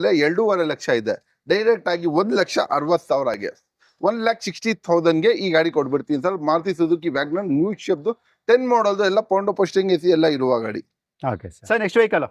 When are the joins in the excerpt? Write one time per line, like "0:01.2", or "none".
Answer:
none